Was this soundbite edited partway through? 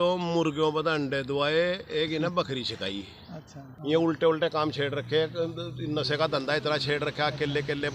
yes; 1 cut; at 3.7 s

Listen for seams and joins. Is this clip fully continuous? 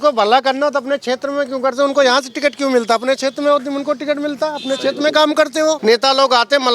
no; 1 cut; at 5.8 s

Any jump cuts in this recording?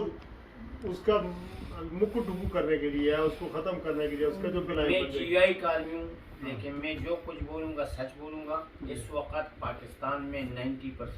yes; 1 cut; at 4.6 s

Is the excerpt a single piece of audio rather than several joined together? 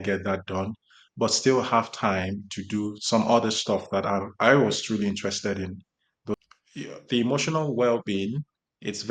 no; 1 cut; at 6.3 s

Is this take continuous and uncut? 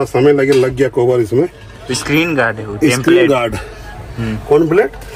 yes; 0 cuts

